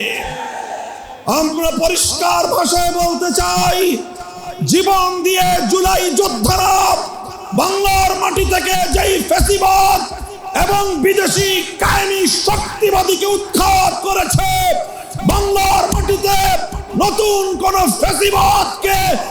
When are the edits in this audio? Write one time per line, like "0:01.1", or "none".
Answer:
none